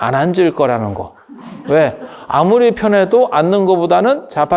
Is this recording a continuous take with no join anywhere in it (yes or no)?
yes